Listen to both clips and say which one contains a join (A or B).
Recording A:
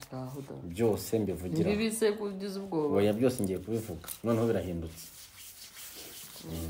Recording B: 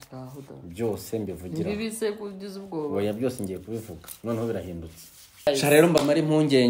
B